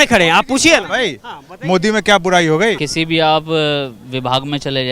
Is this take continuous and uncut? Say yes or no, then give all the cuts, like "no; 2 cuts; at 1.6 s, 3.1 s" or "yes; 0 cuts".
no; 1 cut; at 2.8 s